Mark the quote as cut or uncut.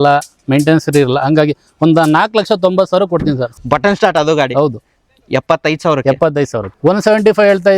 cut